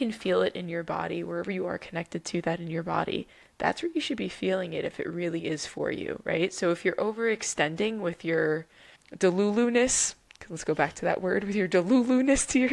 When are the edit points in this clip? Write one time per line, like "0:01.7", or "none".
none

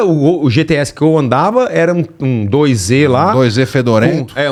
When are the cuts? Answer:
none

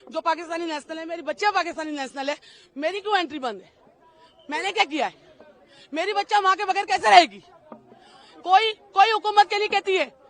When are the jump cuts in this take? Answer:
none

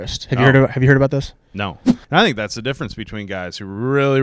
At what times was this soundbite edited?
0:01.9

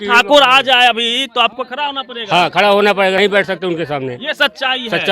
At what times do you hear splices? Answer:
0:03.2

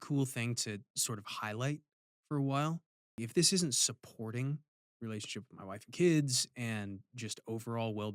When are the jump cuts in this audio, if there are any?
0:03.1
0:04.8

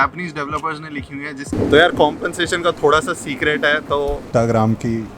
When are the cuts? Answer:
0:01.5
0:04.2

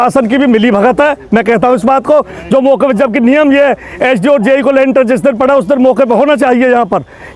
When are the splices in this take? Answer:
none

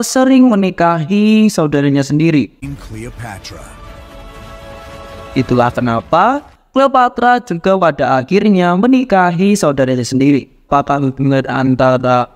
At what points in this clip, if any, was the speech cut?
0:02.6
0:10.7

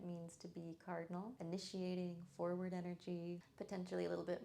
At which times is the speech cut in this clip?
0:01.3
0:03.5

